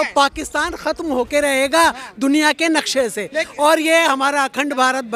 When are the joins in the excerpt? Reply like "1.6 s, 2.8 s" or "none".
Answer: none